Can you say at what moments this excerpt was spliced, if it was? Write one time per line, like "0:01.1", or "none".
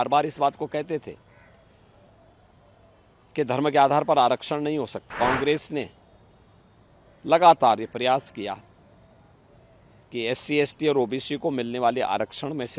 0:05.1